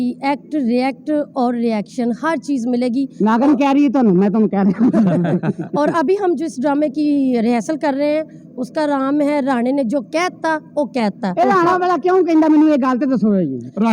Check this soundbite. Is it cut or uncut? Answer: uncut